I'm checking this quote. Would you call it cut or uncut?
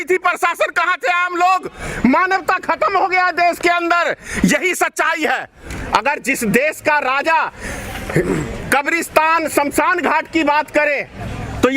cut